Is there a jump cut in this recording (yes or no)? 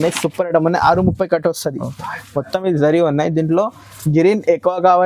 no